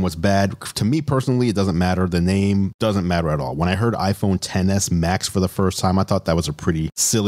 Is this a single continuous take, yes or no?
yes